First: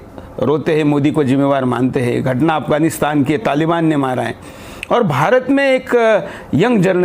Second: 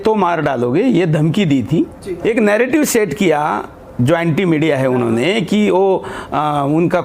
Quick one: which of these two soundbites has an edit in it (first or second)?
second